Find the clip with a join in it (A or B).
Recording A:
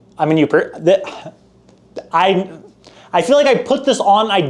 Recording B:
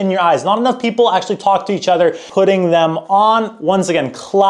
B